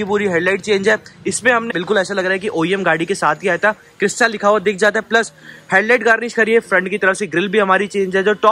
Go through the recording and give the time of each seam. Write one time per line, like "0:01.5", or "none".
0:01.7

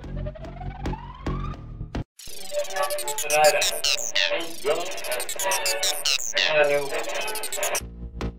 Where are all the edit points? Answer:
0:02.0

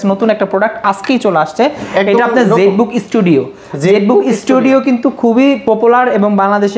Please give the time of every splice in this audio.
none

